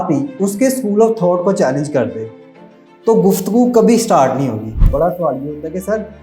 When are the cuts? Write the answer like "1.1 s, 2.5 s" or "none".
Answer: 4.8 s